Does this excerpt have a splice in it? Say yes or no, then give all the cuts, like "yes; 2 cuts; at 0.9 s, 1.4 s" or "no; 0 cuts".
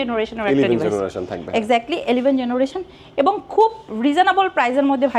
no; 0 cuts